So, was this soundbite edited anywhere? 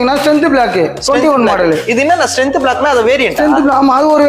no; 0 cuts

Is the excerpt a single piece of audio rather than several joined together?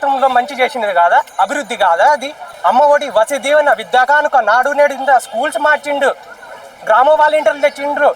yes; 0 cuts

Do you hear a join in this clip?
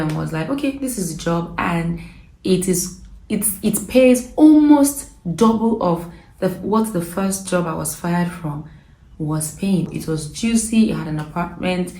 yes; 1 cut; at 9.9 s

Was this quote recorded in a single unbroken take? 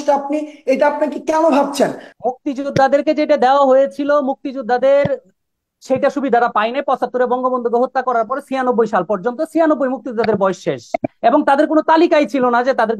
no; 1 cut; at 2.1 s

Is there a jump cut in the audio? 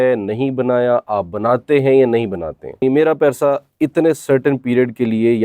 yes; 1 cut; at 2.8 s

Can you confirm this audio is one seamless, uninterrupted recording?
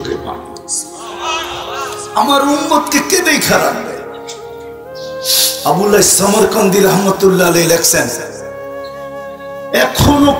yes; 0 cuts

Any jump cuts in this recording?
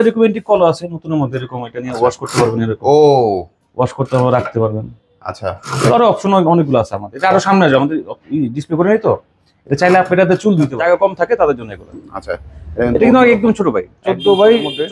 yes; 1 cut; at 10.7 s

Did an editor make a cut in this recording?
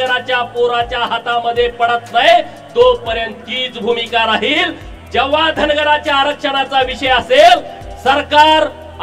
no; 0 cuts

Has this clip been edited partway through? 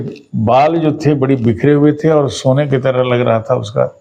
no; 0 cuts

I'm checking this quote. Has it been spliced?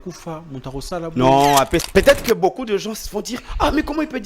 yes; 1 cut; at 1.9 s

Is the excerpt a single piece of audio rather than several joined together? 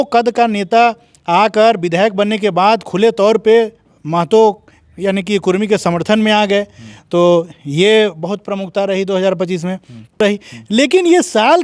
no; 1 cut; at 10.2 s

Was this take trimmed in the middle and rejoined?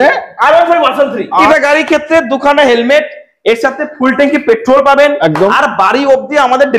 yes; 1 cut; at 1.5 s

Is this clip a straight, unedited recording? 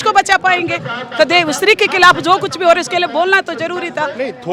yes; 0 cuts

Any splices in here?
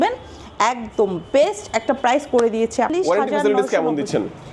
yes; 1 cut; at 2.9 s

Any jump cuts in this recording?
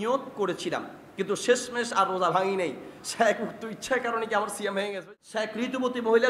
yes; 1 cut; at 5.0 s

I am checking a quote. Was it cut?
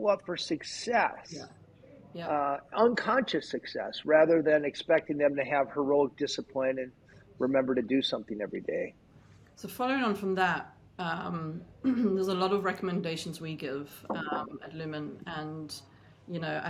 no; 0 cuts

